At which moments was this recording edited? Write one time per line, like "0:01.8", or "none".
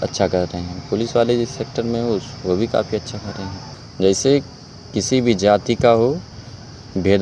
0:03.5